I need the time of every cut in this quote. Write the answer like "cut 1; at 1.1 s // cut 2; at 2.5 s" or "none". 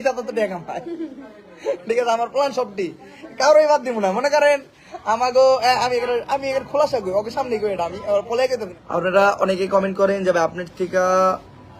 cut 1; at 8.7 s